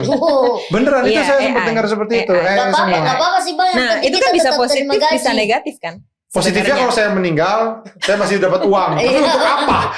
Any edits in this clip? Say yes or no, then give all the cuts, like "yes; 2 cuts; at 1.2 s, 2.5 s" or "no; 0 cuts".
no; 0 cuts